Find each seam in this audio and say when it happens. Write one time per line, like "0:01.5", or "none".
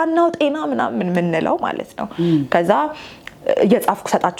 none